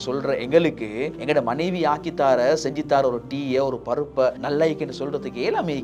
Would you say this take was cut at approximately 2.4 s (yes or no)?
no